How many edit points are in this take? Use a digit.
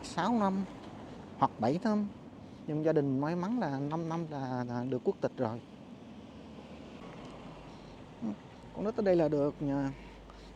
1